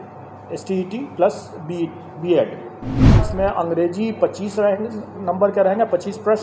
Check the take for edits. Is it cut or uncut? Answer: cut